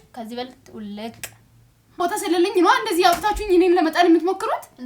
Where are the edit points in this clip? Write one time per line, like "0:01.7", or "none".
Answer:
0:02.0